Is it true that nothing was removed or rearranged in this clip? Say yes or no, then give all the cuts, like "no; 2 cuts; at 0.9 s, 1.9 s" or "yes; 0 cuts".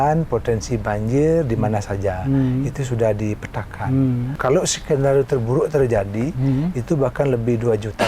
no; 1 cut; at 4.3 s